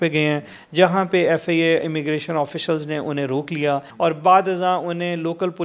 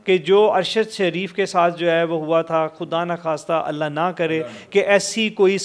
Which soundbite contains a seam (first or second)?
first